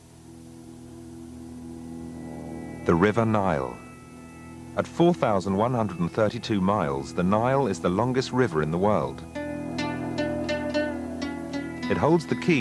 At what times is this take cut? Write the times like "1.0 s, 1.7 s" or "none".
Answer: 10.7 s